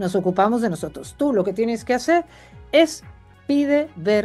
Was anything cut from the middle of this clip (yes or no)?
yes